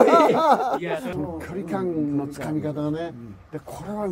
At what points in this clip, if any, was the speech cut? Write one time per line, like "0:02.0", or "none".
0:01.1